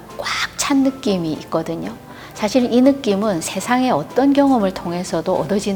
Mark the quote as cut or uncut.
uncut